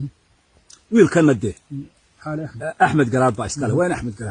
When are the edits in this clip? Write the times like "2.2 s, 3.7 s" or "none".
none